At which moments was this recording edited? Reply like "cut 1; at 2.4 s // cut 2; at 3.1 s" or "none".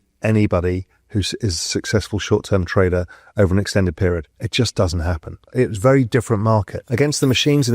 cut 1; at 4.4 s // cut 2; at 5.4 s // cut 3; at 6.8 s